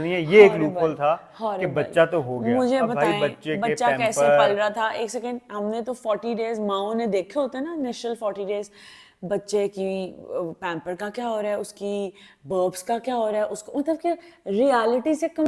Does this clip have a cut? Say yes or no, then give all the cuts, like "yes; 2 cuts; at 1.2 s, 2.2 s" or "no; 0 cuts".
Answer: no; 0 cuts